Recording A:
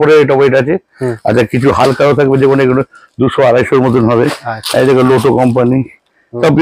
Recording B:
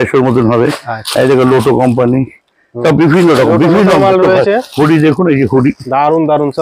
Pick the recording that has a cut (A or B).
B